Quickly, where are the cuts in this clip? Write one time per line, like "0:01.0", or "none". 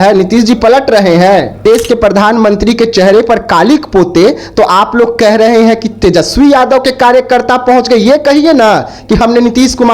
0:01.6